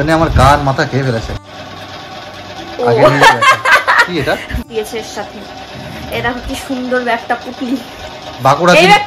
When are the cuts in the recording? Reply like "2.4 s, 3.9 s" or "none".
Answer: 1.4 s, 4.6 s